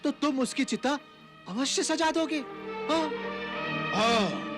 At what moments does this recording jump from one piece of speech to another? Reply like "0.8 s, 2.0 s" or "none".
none